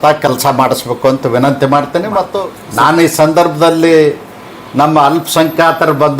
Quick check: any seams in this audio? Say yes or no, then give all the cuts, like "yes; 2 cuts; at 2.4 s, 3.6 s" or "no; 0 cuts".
yes; 1 cut; at 2.4 s